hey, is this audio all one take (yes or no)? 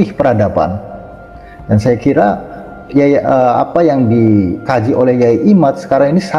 no